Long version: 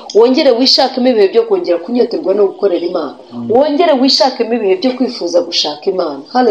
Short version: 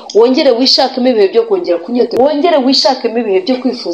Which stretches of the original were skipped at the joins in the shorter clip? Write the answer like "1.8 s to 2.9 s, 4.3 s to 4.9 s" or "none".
2.1 s to 3.5 s